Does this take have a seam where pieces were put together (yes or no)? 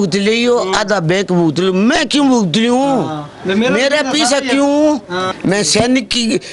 yes